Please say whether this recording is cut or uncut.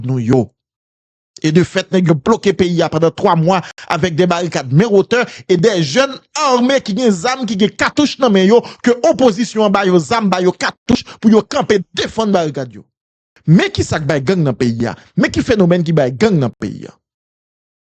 cut